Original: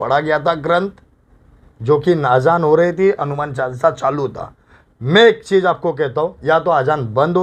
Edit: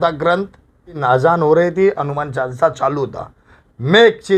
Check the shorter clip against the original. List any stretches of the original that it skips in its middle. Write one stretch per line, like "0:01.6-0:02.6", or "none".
0:01.4-0:02.2